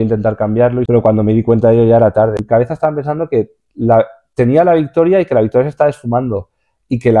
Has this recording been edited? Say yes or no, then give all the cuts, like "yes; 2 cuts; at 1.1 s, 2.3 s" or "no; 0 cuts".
yes; 2 cuts; at 0.9 s, 2.4 s